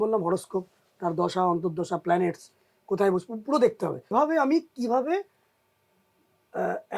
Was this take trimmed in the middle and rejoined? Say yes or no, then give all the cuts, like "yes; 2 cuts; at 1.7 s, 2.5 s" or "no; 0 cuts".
yes; 1 cut; at 4.1 s